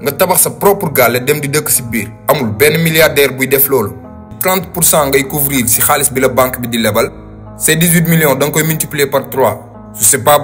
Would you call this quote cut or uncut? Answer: cut